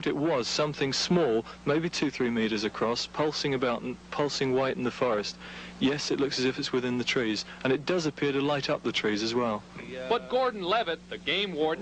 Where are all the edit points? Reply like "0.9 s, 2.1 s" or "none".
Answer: 5.3 s